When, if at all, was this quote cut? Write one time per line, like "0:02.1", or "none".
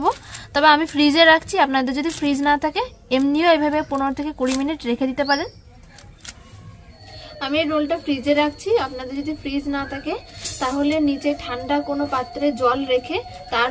none